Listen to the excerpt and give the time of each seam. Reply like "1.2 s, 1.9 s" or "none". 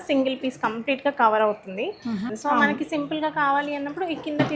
2.2 s